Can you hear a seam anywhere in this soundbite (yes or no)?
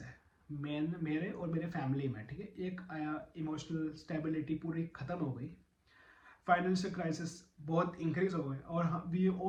no